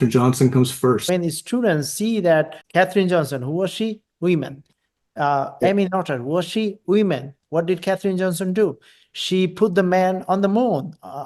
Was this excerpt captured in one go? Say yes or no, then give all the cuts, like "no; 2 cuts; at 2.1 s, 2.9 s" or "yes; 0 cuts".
no; 2 cuts; at 1.0 s, 2.6 s